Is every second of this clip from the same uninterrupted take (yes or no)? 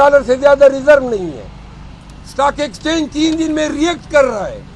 yes